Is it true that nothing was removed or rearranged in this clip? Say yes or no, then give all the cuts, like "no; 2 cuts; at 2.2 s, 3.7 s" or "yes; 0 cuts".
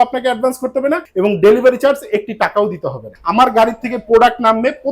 no; 2 cuts; at 1.1 s, 3.1 s